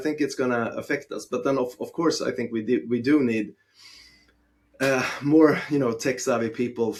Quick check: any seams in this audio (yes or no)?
no